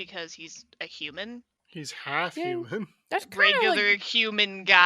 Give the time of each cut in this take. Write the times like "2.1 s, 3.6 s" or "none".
none